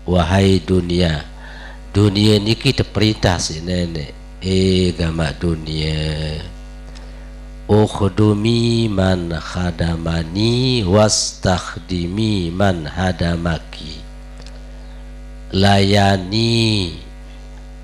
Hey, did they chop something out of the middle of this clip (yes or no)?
no